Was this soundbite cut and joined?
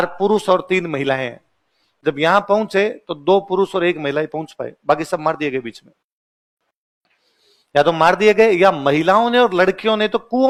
no; 0 cuts

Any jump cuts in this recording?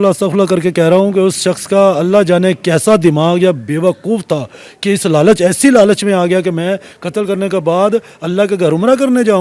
no; 0 cuts

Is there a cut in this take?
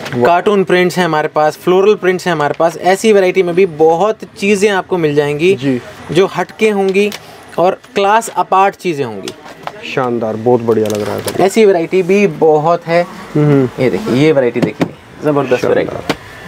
no; 0 cuts

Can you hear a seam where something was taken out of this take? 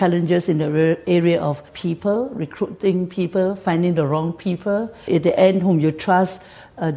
yes; 2 cuts; at 1.7 s, 5.0 s

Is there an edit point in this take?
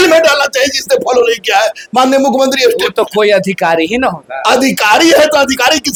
no; 0 cuts

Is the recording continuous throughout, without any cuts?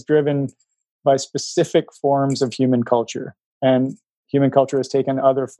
yes; 0 cuts

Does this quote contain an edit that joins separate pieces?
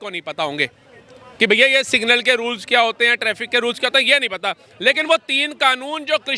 no; 0 cuts

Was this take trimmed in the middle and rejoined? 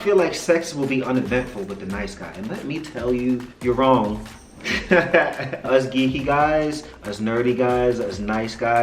yes; 2 cuts; at 3.5 s, 5.7 s

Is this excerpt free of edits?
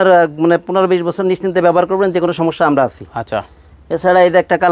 yes; 0 cuts

